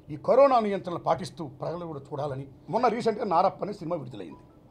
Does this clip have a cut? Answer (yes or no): yes